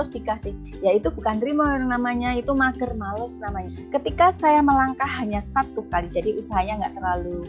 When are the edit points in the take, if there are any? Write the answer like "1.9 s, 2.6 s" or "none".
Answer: 3.5 s